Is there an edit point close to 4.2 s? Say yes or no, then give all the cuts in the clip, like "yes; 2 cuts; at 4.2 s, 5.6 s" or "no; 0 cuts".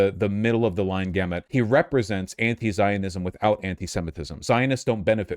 no; 1 cut; at 1.4 s